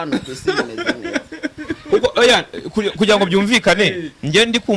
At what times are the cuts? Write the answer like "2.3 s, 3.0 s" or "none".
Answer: none